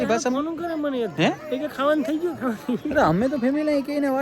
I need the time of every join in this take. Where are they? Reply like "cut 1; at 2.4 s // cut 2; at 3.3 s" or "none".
none